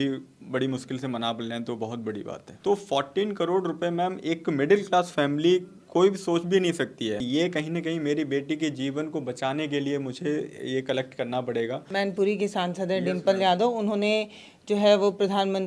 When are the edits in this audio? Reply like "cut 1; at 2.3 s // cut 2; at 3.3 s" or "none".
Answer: cut 1; at 2.4 s // cut 2; at 7.2 s // cut 3; at 11.9 s